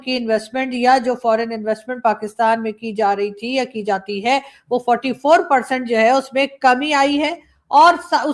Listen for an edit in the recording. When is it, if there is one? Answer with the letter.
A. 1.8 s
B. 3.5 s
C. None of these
C